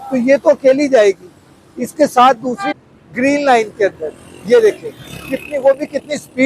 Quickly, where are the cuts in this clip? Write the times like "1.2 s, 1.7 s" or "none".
2.7 s